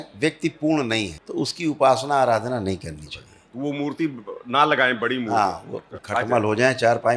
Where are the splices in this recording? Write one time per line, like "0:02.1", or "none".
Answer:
0:01.2
0:06.0